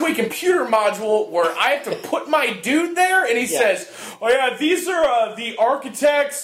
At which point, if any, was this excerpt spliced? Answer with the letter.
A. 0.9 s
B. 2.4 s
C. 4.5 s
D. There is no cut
D